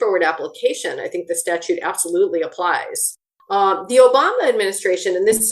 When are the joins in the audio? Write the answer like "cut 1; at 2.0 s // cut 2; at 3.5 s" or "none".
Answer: cut 1; at 3.1 s